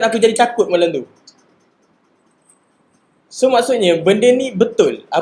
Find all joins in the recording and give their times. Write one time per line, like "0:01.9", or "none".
none